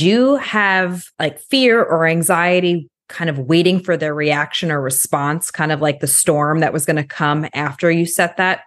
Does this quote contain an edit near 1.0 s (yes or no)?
yes